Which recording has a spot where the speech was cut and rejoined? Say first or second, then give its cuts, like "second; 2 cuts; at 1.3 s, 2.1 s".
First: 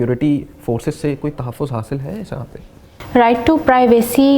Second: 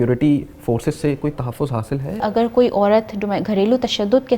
second; 1 cut; at 2.2 s